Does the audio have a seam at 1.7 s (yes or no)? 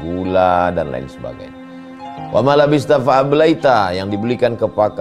no